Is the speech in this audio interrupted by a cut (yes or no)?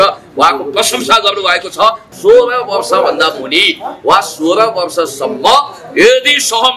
yes